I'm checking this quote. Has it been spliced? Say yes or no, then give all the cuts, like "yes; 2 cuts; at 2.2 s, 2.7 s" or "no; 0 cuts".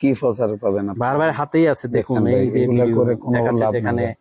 no; 0 cuts